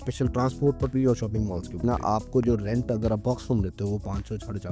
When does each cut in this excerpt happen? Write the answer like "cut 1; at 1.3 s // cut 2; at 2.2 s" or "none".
cut 1; at 1.8 s